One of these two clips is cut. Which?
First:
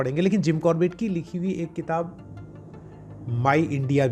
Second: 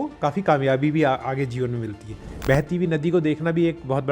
second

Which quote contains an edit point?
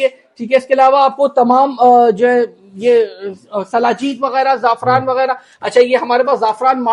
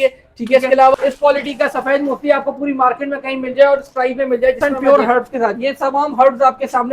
second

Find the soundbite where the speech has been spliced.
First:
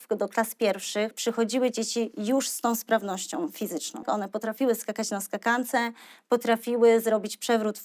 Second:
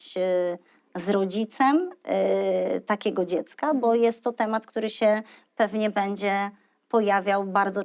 first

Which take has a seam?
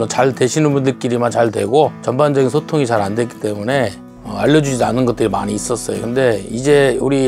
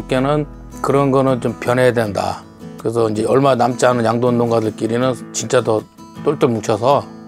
first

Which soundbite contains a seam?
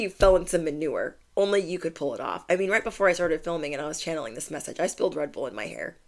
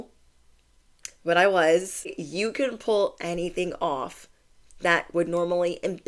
second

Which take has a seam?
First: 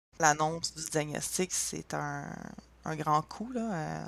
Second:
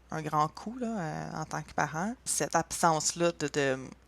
second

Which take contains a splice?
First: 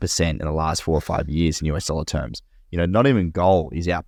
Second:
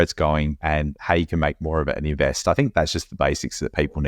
second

